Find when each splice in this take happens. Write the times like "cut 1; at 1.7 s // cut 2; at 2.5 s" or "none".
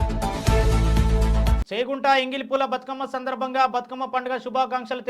cut 1; at 1.6 s